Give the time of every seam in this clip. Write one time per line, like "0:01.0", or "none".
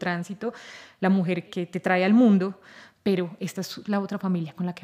0:01.5